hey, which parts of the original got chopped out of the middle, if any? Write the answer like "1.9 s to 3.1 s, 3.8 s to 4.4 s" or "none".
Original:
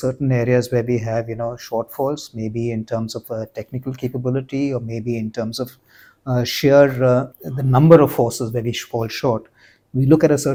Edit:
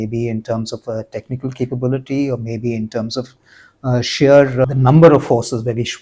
7.1 s to 7.5 s